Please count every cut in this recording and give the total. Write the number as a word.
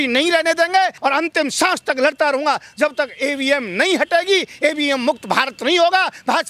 one